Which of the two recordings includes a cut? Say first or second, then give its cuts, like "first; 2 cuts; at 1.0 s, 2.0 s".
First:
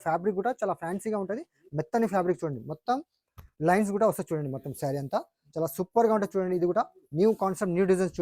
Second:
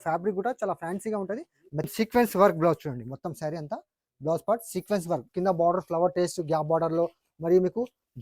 second; 2 cuts; at 1.9 s, 5.3 s